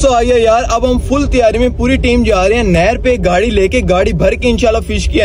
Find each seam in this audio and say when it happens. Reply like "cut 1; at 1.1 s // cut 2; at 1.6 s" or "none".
none

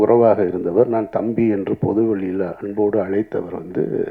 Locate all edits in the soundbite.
none

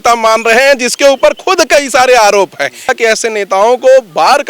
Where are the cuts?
cut 1; at 2.9 s

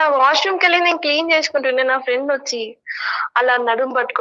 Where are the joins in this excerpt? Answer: none

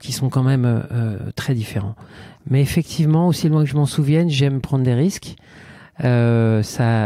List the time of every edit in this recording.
none

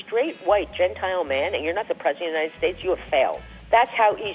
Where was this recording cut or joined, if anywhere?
cut 1; at 3.4 s

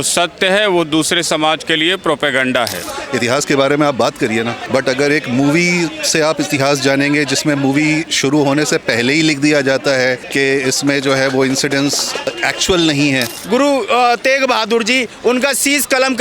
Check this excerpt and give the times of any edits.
cut 1; at 2.8 s // cut 2; at 4.6 s // cut 3; at 10.2 s // cut 4; at 12.3 s // cut 5; at 13.4 s

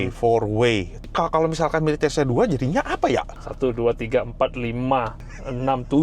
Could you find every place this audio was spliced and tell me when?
cut 1; at 1.1 s // cut 2; at 3.4 s

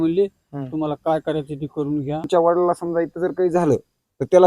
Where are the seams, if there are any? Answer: cut 1; at 2.3 s

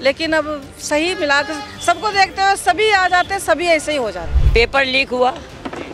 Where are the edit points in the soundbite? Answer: cut 1; at 4.3 s

